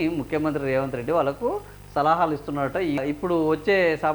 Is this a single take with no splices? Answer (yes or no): no